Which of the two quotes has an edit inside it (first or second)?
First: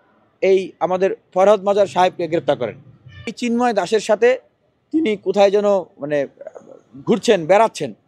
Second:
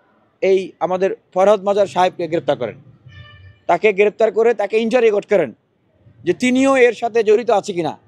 first